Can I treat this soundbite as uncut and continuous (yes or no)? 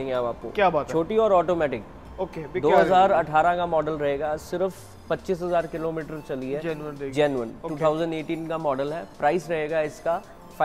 yes